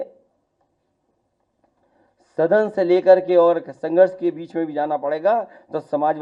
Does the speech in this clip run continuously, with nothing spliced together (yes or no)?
yes